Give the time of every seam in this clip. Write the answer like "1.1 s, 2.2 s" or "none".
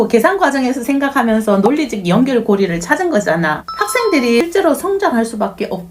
4.4 s